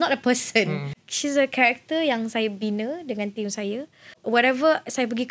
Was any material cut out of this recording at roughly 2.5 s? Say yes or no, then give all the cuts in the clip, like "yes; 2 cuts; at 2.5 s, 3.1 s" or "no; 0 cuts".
no; 2 cuts; at 1.1 s, 4.2 s